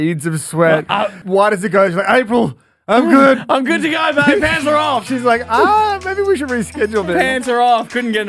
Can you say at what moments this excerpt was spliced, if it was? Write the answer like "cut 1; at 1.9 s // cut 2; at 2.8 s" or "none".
cut 1; at 1.2 s